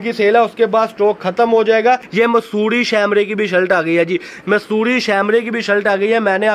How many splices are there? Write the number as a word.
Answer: one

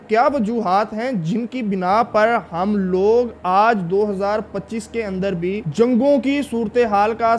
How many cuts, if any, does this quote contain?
one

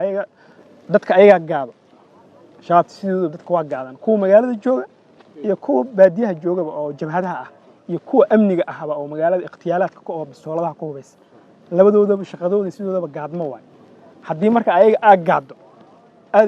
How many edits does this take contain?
zero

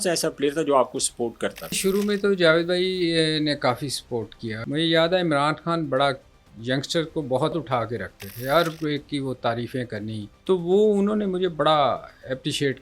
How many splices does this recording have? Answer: four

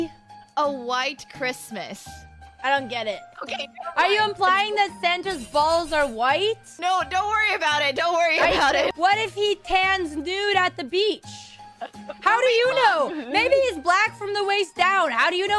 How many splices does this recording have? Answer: zero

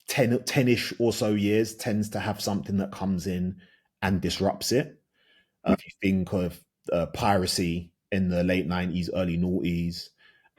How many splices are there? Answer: one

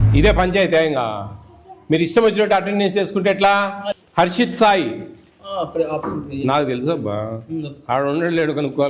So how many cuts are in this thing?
one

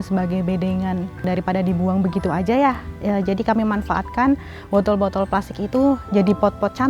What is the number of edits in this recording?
one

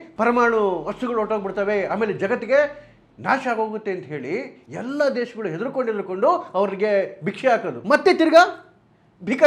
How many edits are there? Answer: one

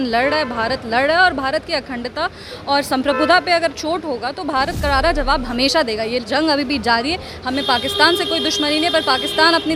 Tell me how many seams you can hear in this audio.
zero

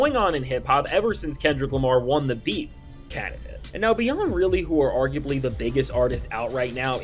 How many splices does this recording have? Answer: one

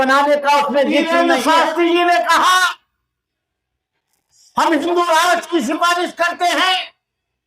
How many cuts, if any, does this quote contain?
one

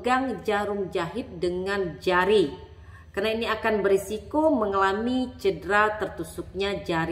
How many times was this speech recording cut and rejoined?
zero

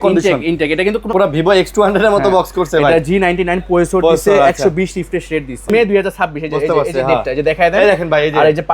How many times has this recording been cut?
two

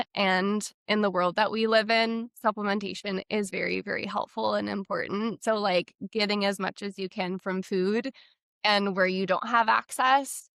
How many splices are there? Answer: zero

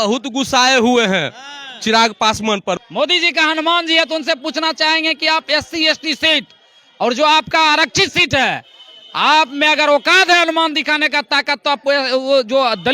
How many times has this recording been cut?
one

